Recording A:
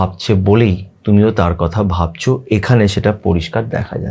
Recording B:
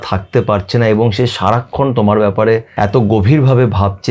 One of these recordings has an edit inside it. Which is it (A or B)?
B